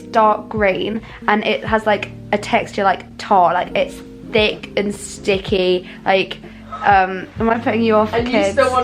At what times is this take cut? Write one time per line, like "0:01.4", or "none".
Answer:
none